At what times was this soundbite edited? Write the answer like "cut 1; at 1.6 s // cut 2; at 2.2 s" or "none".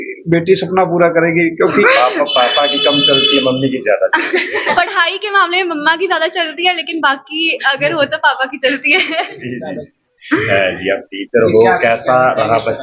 cut 1; at 1.8 s